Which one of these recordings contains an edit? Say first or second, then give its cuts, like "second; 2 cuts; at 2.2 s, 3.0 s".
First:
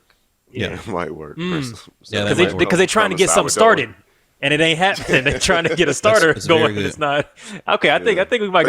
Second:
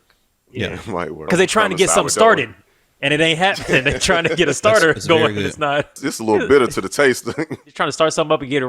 second; 3 cuts; at 1.3 s, 6.1 s, 7.7 s